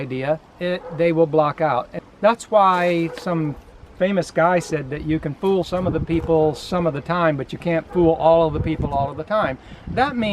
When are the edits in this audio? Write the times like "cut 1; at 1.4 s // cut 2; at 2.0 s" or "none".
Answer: cut 1; at 2.0 s